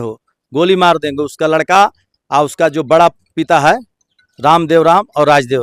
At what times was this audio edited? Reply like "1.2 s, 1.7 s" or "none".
none